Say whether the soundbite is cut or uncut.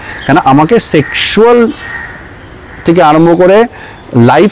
uncut